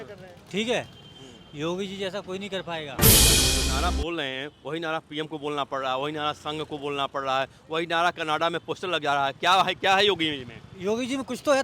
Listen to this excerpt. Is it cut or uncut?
cut